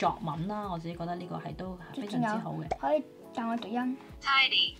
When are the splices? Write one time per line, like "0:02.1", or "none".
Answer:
none